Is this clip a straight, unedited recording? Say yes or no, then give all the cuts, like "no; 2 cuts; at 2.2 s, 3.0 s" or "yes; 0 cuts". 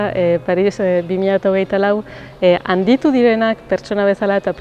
yes; 0 cuts